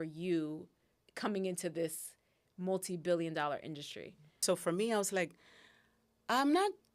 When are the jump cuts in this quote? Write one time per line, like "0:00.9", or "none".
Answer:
0:01.0
0:04.4